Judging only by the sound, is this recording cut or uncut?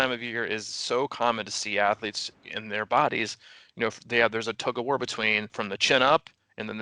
cut